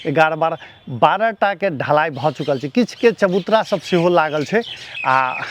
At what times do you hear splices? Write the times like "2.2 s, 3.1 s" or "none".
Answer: none